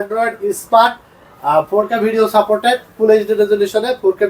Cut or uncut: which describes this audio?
uncut